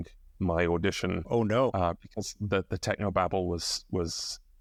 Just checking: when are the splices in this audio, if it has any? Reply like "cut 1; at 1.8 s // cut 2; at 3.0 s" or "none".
none